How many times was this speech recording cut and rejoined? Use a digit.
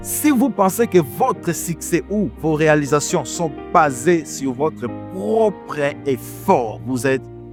0